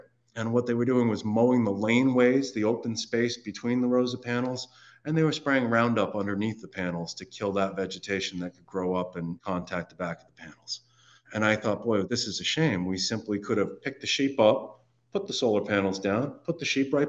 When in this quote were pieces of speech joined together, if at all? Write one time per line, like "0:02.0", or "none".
none